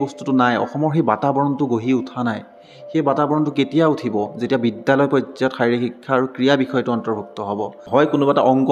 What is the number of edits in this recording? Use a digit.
1